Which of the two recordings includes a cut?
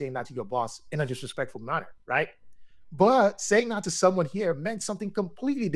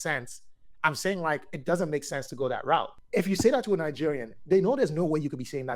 second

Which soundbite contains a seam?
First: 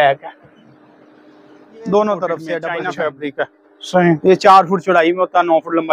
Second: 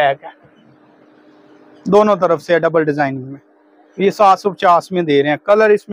first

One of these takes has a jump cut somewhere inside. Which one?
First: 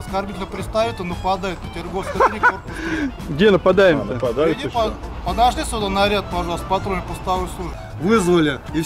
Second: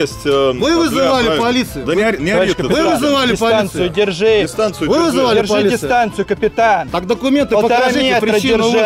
first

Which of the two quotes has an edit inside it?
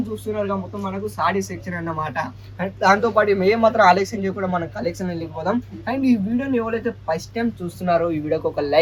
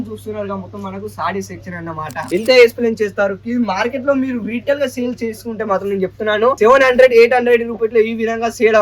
second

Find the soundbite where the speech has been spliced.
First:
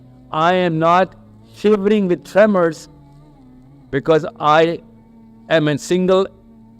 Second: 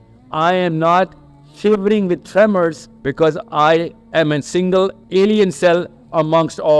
second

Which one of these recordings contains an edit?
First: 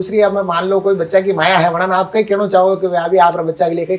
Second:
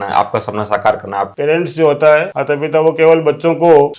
second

